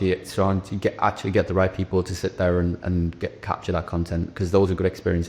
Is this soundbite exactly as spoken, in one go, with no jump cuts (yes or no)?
yes